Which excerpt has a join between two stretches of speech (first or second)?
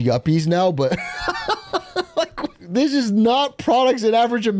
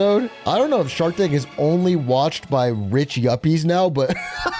first